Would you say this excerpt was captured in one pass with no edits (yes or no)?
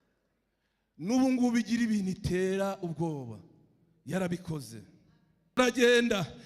no